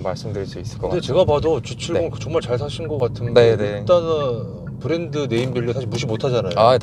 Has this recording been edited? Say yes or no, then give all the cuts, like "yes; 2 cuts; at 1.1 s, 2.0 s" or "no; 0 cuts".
no; 0 cuts